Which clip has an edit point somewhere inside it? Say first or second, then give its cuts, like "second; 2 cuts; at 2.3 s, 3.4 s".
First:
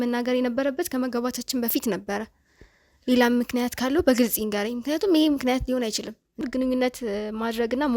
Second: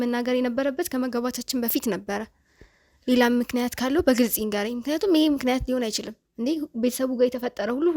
first; 1 cut; at 6.4 s